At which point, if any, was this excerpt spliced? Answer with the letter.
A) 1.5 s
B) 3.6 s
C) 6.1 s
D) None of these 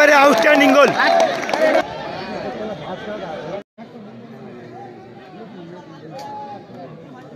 B